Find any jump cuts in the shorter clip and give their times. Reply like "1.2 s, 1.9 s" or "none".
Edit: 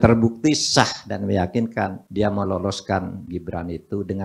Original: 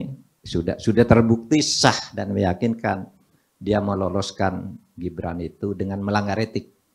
2.0 s, 3.2 s